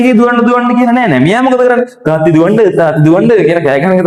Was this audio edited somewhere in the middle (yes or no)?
no